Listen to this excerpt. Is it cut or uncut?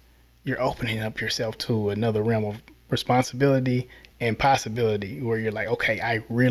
uncut